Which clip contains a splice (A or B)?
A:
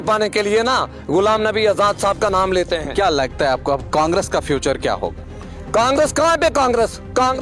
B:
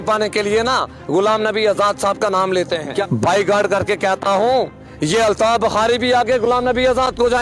B